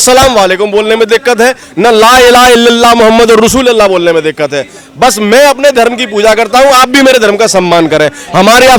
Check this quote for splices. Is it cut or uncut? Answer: uncut